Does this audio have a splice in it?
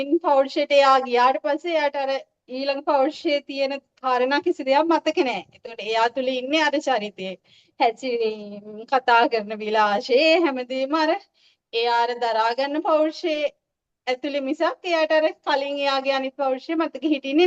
no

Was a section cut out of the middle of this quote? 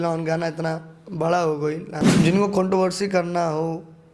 yes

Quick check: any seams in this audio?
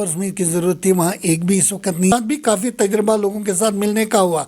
yes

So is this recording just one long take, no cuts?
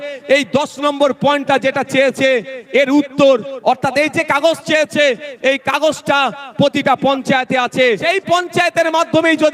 no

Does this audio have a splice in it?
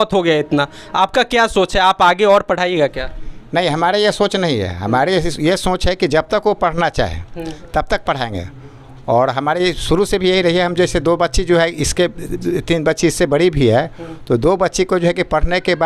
no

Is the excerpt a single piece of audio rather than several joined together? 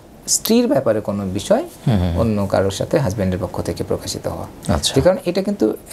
yes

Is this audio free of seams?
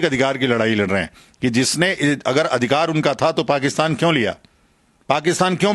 yes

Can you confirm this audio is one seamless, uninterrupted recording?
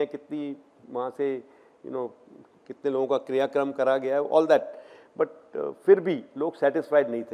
yes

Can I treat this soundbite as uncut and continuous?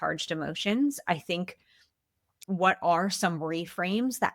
no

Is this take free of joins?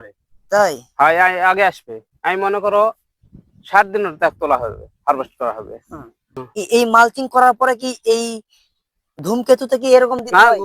no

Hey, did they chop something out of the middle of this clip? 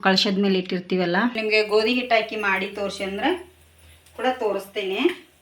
yes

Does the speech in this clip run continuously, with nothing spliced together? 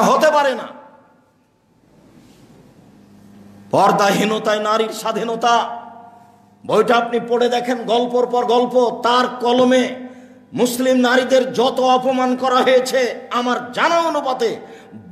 no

